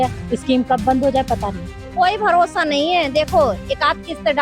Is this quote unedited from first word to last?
no; 1 cut; at 1.8 s

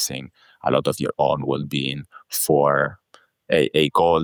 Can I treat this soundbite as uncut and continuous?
yes; 0 cuts

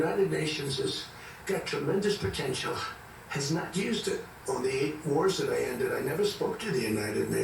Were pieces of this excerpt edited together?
yes; 1 cut; at 4.3 s

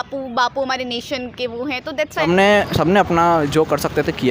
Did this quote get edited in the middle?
yes; 1 cut; at 2.2 s

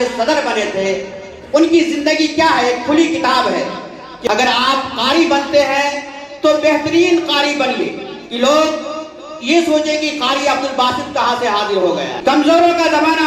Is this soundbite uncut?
no; 2 cuts; at 4.3 s, 12.1 s

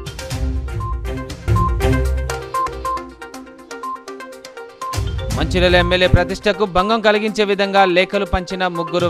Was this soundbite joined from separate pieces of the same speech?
yes; 1 cut; at 1.4 s

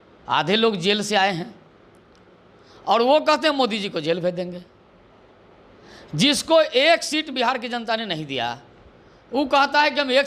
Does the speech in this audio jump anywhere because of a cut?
no; 0 cuts

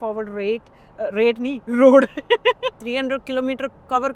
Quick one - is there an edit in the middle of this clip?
yes; 1 cut; at 2.8 s

